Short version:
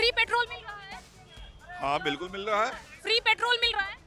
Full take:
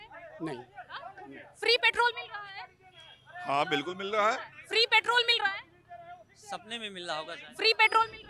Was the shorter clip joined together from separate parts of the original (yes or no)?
no